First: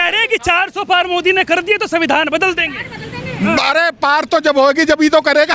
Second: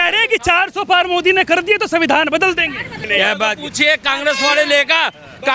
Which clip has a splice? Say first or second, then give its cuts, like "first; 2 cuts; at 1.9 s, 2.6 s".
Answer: second; 1 cut; at 3.1 s